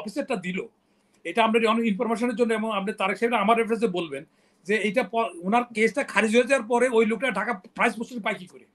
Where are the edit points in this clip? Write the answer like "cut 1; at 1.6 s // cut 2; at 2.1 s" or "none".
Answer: none